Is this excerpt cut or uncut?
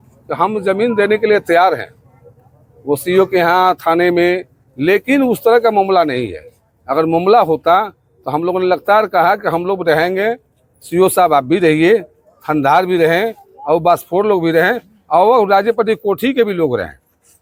uncut